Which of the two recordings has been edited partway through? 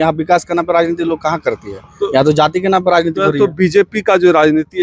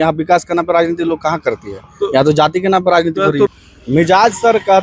second; 1 cut; at 3.5 s

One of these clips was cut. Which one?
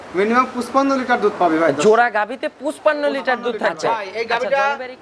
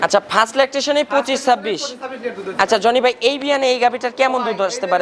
first; 1 cut; at 3.8 s

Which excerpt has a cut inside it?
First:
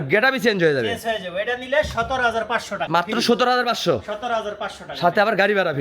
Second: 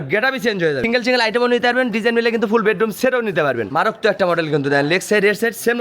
second; 2 cuts; at 0.8 s, 3.6 s

